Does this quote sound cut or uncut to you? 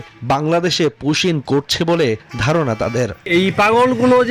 cut